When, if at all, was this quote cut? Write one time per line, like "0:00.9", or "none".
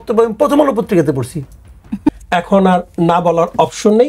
0:02.1